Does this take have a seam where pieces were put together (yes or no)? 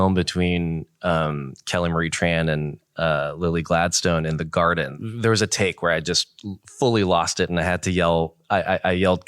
yes